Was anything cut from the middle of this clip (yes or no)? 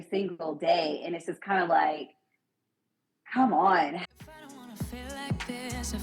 yes